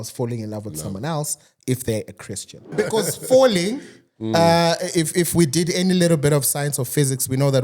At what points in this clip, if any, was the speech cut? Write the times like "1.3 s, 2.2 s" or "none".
2.7 s